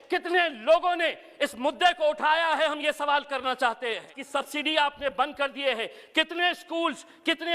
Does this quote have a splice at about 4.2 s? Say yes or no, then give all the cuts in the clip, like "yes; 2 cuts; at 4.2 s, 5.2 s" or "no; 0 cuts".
yes; 1 cut; at 4.2 s